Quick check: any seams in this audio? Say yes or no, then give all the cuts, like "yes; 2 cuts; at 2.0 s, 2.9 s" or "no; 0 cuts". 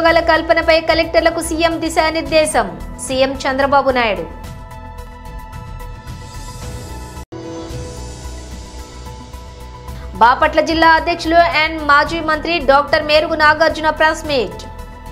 yes; 3 cuts; at 4.9 s, 7.3 s, 9.2 s